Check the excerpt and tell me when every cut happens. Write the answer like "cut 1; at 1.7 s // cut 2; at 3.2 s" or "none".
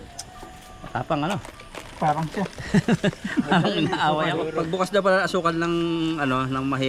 cut 1; at 4.5 s